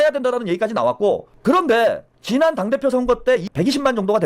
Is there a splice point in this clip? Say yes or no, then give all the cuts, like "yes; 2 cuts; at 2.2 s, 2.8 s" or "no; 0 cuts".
yes; 3 cuts; at 1.3 s, 2.1 s, 3.5 s